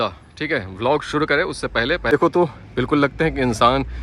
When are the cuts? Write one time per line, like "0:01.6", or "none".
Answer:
0:02.1